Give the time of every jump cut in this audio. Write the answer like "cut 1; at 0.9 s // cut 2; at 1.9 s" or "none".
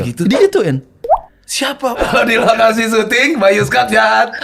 cut 1; at 2.0 s